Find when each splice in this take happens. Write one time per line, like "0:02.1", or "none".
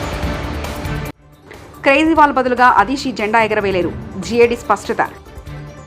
0:01.2